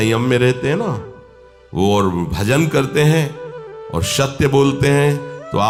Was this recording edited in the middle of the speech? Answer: no; 0 cuts

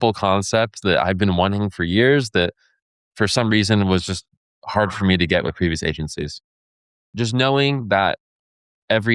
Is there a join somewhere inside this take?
yes; 1 cut; at 7.1 s

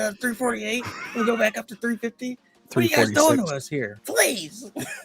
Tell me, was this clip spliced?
yes; 1 cut; at 4.0 s

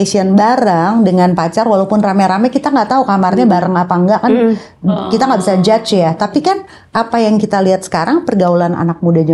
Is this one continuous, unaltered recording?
yes; 0 cuts

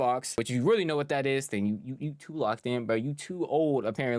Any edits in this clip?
no; 0 cuts

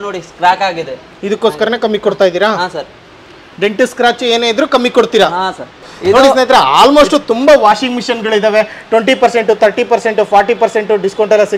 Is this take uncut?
no; 1 cut; at 5.9 s

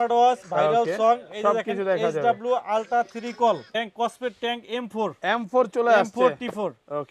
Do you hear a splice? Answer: yes; 1 cut; at 3.7 s

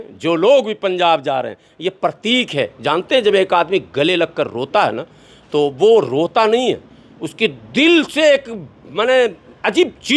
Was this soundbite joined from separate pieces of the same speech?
no; 0 cuts

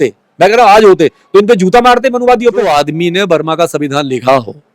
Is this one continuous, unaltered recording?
no; 1 cut; at 2.6 s

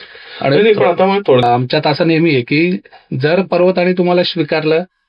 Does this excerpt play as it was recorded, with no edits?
no; 1 cut; at 1.5 s

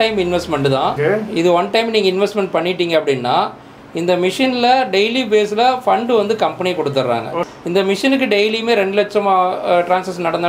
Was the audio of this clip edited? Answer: yes; 2 cuts; at 1.0 s, 7.5 s

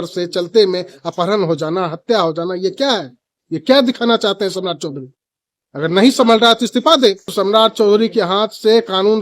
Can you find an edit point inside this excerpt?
yes; 1 cut; at 7.3 s

